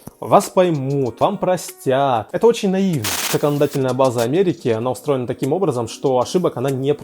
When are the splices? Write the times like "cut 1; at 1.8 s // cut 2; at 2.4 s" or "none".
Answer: cut 1; at 1.1 s // cut 2; at 2.3 s // cut 3; at 3.3 s

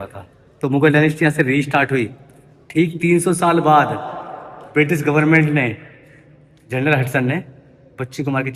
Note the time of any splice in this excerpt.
none

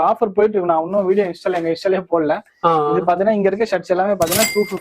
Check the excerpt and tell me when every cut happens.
none

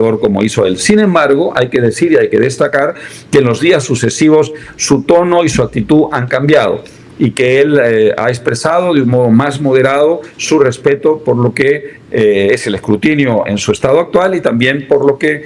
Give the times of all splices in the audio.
none

